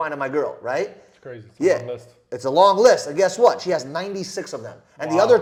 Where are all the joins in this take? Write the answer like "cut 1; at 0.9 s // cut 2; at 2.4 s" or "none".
none